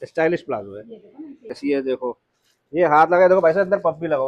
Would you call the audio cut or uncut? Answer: cut